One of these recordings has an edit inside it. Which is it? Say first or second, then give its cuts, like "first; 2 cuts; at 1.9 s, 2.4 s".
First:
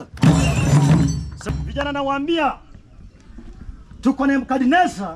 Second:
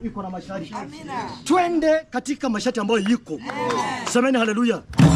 first; 1 cut; at 1.6 s